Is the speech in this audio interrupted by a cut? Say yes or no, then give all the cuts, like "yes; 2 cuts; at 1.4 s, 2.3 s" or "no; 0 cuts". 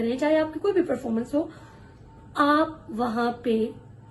no; 0 cuts